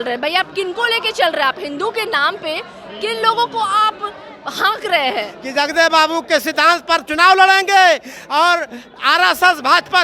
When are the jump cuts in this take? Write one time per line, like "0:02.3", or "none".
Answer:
0:05.4